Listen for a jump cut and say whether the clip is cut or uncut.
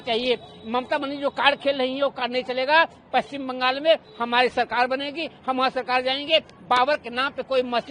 uncut